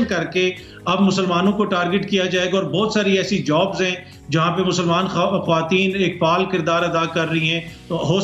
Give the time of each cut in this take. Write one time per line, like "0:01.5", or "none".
none